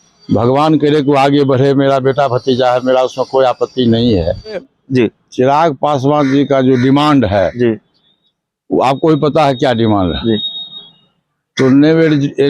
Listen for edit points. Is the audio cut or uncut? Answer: cut